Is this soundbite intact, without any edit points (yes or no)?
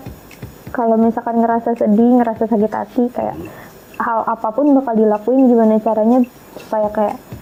yes